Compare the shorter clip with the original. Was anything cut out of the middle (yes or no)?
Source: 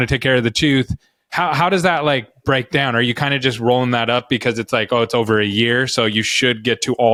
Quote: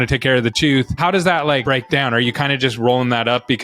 yes